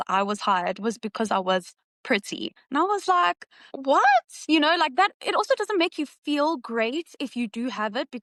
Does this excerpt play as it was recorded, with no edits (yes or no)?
yes